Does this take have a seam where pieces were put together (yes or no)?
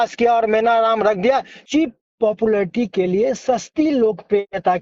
yes